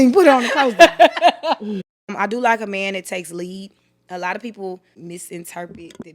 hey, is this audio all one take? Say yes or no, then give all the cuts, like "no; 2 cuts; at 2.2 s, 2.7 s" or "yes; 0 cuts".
no; 2 cuts; at 1.9 s, 4.9 s